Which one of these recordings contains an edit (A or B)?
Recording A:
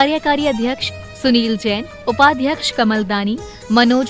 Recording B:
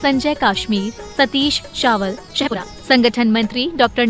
B